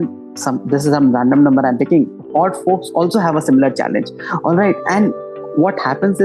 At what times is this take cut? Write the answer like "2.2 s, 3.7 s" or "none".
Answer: none